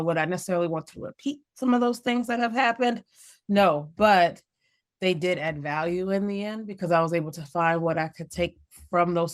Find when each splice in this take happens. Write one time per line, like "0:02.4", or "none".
none